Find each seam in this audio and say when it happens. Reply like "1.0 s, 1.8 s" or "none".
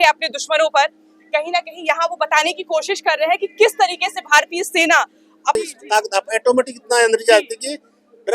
5.6 s